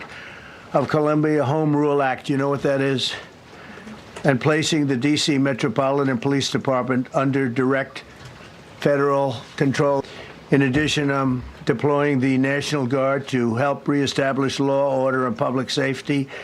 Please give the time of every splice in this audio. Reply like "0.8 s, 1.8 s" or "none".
10.0 s